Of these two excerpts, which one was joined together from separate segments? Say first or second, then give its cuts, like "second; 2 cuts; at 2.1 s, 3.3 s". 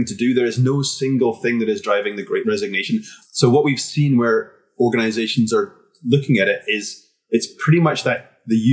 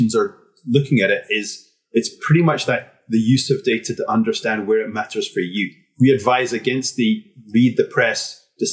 first; 1 cut; at 3.1 s